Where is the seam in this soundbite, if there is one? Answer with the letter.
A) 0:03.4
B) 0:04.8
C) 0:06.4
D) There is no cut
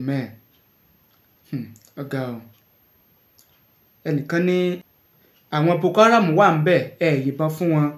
B